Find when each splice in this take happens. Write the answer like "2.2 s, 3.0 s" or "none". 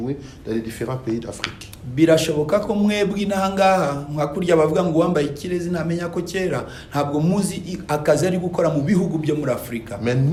none